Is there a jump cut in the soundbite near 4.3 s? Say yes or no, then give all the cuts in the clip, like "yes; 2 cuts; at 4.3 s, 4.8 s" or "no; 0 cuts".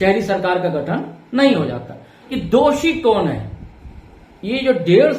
no; 1 cut; at 2.3 s